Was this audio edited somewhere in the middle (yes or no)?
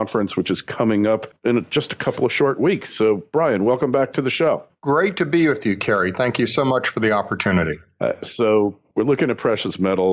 yes